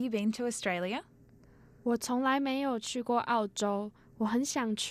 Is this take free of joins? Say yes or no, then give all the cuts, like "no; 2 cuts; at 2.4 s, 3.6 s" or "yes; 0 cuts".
no; 1 cut; at 1.5 s